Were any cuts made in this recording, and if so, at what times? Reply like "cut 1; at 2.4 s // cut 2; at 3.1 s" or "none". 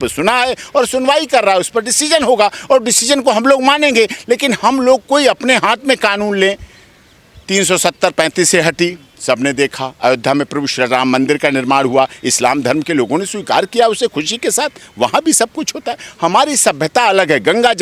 none